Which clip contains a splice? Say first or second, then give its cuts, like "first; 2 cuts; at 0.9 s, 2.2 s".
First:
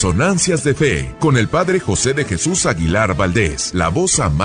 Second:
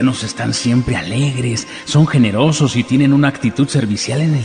first; 2 cuts; at 1.1 s, 3.6 s